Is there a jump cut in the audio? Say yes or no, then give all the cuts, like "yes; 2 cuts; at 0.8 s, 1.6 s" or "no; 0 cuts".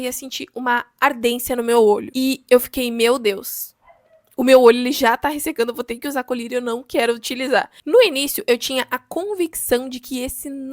yes; 2 cuts; at 2.1 s, 7.8 s